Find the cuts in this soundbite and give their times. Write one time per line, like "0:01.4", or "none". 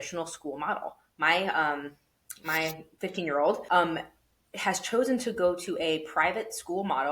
0:03.6